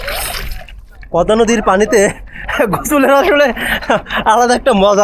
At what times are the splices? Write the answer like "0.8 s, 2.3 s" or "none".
1.0 s